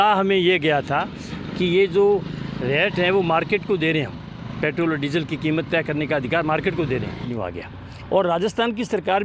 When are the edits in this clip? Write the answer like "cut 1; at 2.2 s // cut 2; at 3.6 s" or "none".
cut 1; at 7.3 s